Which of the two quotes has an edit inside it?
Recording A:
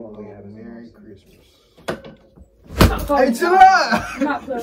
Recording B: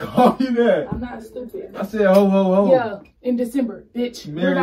A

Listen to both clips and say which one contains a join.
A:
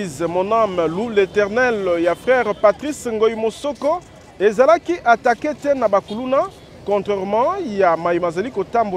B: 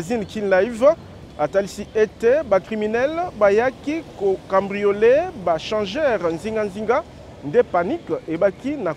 B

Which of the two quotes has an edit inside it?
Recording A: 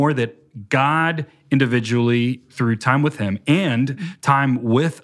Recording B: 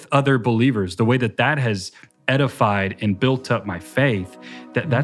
A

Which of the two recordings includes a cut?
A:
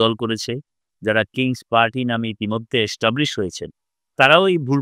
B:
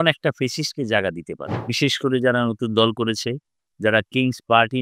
B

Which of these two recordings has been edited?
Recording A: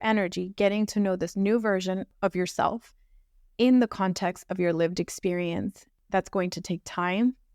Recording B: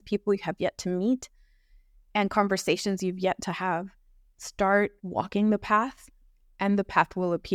A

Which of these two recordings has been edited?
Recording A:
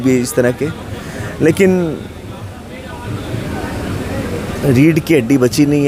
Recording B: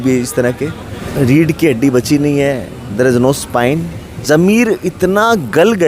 B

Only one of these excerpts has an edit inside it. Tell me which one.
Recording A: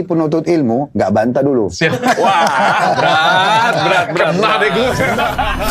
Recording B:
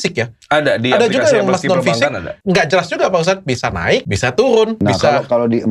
B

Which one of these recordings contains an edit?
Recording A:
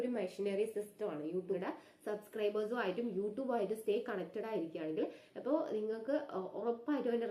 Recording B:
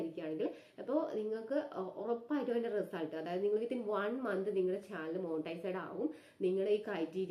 A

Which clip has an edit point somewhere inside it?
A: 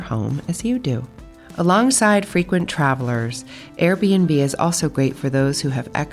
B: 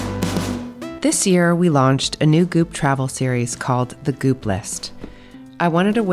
B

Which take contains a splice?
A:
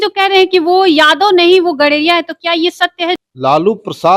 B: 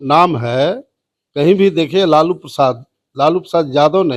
A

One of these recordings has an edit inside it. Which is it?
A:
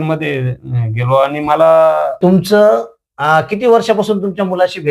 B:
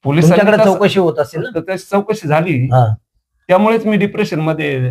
A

